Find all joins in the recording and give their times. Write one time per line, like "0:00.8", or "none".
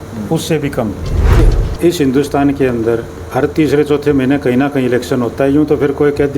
0:01.4